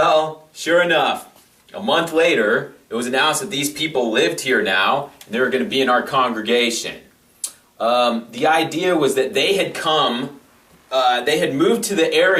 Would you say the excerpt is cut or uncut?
cut